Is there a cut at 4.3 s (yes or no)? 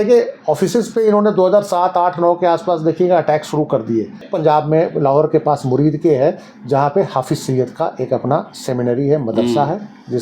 yes